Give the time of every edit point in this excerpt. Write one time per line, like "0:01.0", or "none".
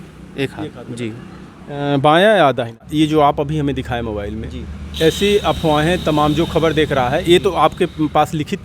0:02.9